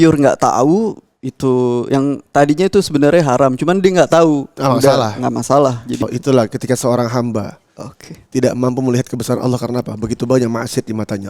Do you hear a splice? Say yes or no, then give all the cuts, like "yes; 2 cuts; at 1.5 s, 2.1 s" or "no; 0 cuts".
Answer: yes; 1 cut; at 6.0 s